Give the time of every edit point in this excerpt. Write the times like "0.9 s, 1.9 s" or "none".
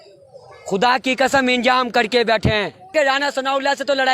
2.9 s